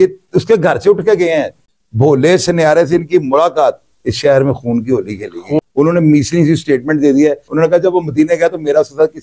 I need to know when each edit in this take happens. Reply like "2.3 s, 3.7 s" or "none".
1.6 s, 5.6 s